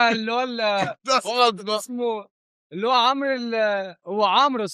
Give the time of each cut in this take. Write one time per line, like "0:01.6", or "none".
none